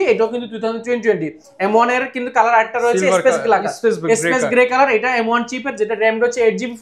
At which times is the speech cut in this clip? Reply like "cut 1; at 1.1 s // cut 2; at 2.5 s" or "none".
none